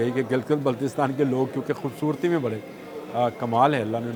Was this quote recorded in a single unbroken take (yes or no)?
yes